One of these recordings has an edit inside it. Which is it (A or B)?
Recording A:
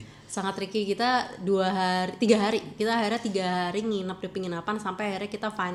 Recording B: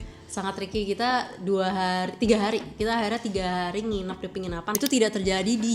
B